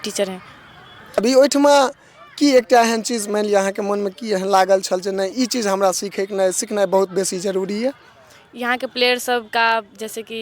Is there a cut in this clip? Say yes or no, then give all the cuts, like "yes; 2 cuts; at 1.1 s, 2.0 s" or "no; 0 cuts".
yes; 1 cut; at 1.2 s